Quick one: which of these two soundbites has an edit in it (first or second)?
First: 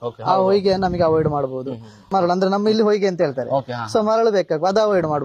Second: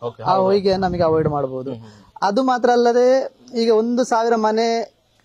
second